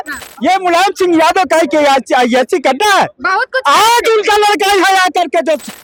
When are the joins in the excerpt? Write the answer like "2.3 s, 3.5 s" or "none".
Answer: none